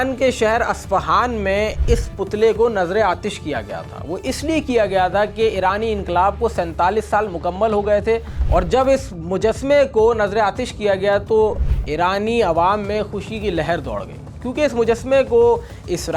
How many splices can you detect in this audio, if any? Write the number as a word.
zero